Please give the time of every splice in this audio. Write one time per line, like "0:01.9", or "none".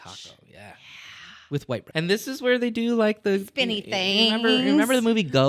0:01.9